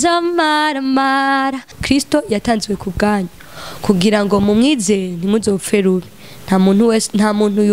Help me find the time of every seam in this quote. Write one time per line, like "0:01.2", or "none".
0:01.8

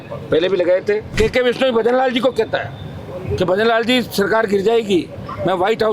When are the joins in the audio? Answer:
0:01.1

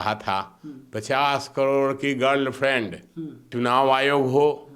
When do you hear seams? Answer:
0:03.5

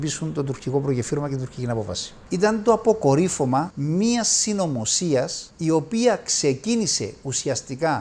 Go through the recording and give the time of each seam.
0:02.2

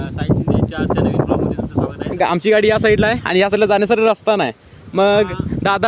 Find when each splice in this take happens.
0:02.1

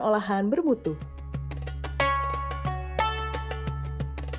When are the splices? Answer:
0:01.4

